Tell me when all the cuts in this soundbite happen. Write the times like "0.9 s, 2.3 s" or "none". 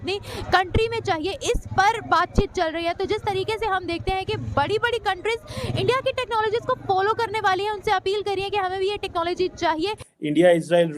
10.0 s